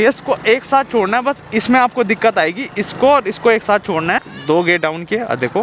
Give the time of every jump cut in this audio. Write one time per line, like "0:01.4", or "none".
0:04.3